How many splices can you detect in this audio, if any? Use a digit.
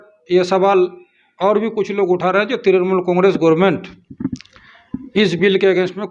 0